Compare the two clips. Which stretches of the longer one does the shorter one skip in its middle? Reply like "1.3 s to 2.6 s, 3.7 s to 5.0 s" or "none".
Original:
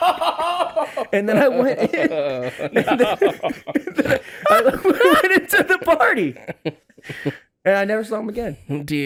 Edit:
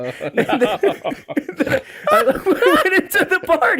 none